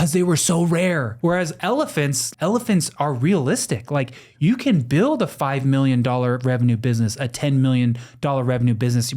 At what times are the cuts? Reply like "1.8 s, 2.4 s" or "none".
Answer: 1.1 s, 2.2 s